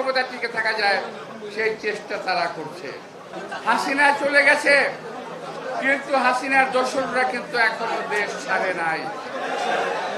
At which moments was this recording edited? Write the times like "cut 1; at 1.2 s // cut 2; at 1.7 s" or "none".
cut 1; at 3.3 s

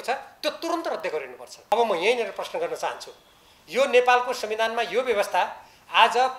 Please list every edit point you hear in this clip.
cut 1; at 1.7 s

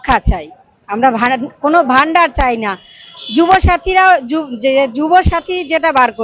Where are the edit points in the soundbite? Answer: none

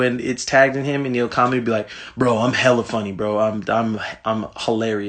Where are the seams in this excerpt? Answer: none

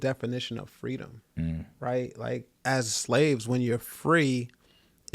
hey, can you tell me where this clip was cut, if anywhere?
cut 1; at 1.2 s // cut 2; at 2.5 s

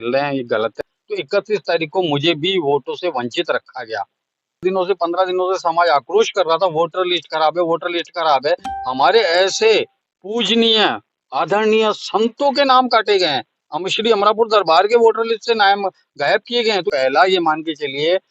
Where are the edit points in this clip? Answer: cut 1; at 0.8 s // cut 2; at 4.6 s // cut 3; at 16.9 s

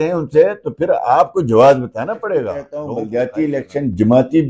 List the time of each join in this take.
cut 1; at 2.8 s

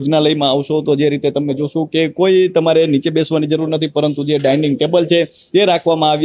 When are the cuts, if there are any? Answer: none

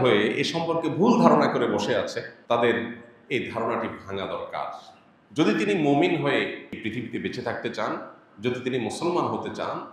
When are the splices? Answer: cut 1; at 2.3 s // cut 2; at 6.7 s

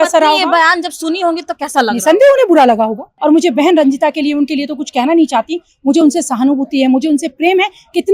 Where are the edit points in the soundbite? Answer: cut 1; at 3.1 s

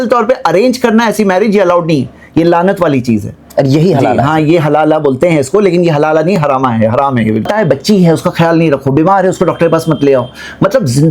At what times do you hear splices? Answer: cut 1; at 7.5 s

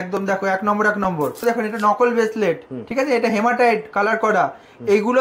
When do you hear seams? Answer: cut 1; at 1.4 s

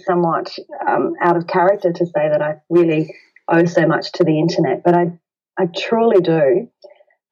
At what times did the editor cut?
none

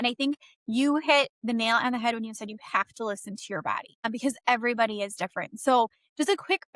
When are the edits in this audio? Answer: cut 1; at 4.0 s

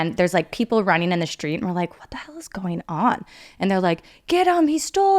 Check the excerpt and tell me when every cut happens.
cut 1; at 3.4 s

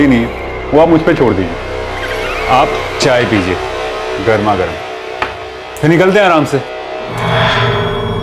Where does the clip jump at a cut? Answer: cut 1; at 7.2 s

